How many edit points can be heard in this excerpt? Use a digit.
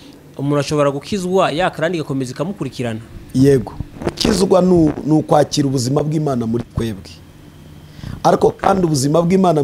1